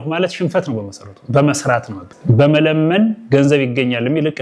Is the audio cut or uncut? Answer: cut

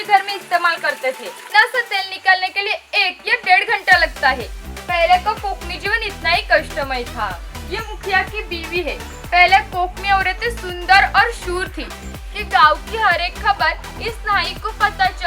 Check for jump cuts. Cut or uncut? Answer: cut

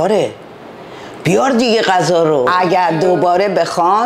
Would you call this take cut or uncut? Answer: cut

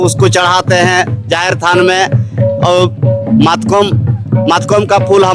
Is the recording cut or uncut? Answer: uncut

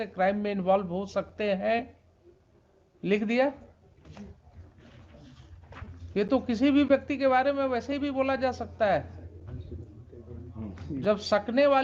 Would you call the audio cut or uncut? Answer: uncut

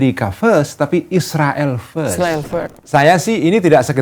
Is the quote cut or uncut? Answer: cut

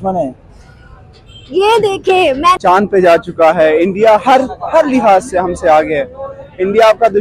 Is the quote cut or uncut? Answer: cut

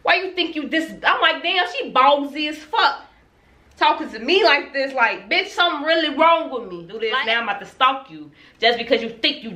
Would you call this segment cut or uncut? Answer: cut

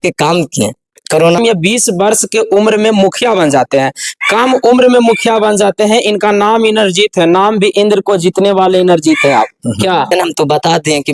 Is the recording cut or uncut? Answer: cut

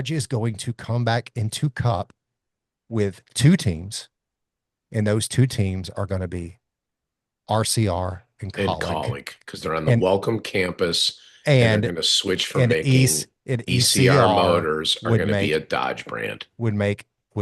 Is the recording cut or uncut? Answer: uncut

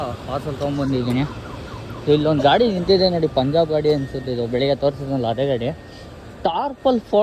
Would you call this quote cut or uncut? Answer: uncut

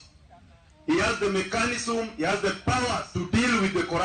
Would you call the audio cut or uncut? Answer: cut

